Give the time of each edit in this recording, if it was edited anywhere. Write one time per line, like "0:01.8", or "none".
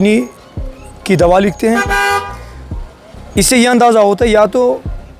none

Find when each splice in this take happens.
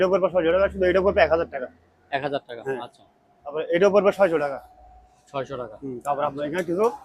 none

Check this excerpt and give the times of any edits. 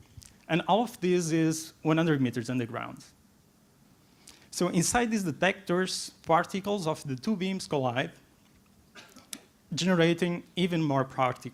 none

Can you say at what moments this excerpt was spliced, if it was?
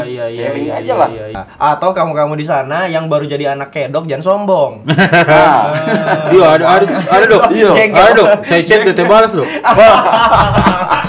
0:01.4

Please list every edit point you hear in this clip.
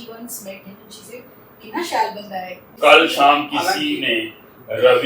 0:02.6

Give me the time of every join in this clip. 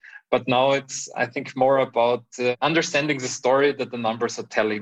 0:02.5

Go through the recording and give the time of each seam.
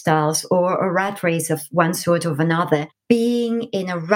0:02.9

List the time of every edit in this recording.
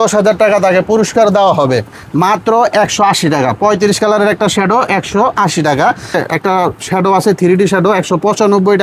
0:02.0
0:06.2

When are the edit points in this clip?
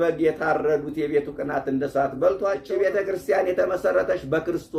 0:02.7

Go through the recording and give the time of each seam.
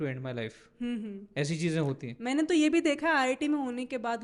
none

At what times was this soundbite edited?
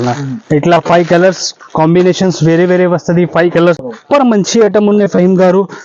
0:03.8

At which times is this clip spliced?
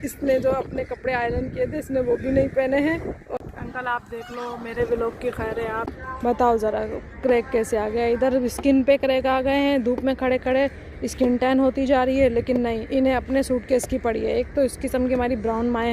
0:03.3
0:05.8

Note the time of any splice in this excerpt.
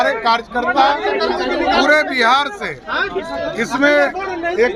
none

